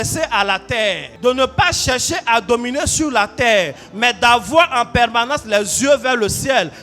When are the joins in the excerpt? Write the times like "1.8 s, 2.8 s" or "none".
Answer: 1.1 s